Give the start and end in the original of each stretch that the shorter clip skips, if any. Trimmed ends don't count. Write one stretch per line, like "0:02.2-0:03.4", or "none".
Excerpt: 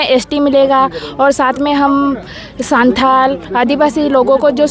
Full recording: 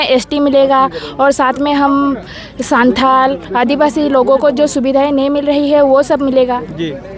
none